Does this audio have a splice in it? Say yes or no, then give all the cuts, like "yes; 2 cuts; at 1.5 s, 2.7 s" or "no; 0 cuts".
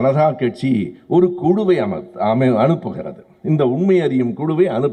no; 0 cuts